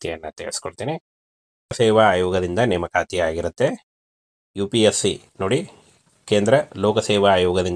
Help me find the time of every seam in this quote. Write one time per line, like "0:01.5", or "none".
0:01.8